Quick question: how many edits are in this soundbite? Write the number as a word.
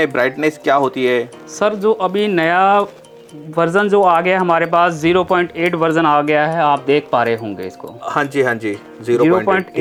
zero